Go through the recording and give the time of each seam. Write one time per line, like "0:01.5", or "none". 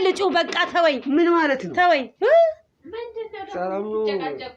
none